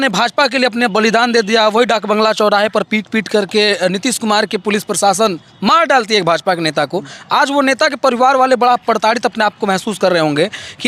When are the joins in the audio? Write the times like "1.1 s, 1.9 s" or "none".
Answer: none